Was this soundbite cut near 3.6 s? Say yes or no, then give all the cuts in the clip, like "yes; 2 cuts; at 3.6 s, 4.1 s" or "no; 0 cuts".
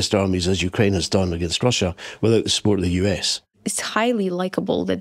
yes; 1 cut; at 3.6 s